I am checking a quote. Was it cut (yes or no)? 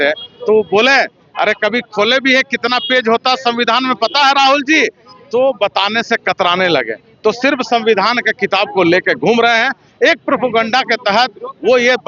no